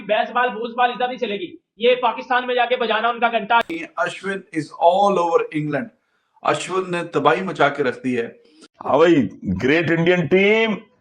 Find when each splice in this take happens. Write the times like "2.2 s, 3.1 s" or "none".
3.6 s, 8.7 s

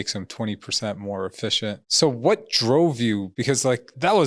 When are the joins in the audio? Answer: 1.9 s, 3.4 s

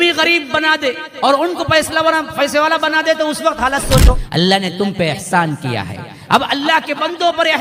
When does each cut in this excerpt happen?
4.2 s

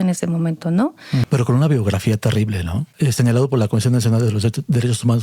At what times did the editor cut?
1.2 s, 2.8 s

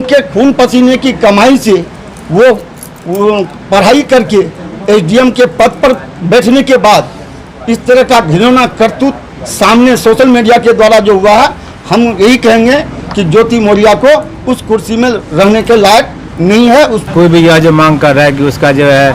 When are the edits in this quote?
17.1 s

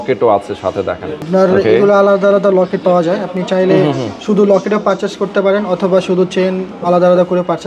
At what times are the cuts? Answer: none

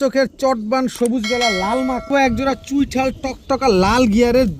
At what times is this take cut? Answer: 2.1 s

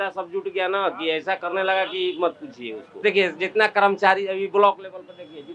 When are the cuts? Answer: 2.9 s

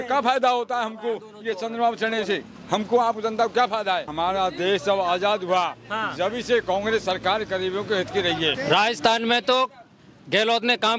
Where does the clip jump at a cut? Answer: 4.1 s, 8.6 s

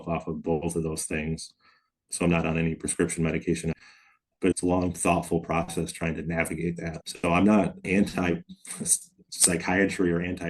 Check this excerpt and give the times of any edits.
7.0 s

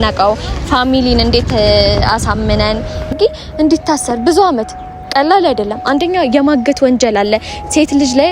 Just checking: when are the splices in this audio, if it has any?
3.1 s

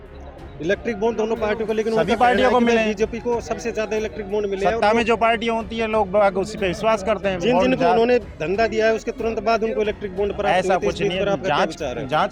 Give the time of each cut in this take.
none

